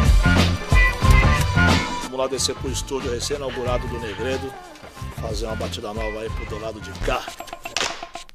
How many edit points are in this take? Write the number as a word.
zero